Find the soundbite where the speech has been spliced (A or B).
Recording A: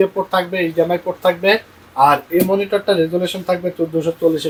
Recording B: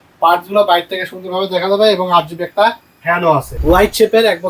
B